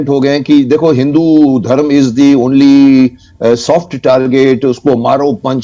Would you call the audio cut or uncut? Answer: uncut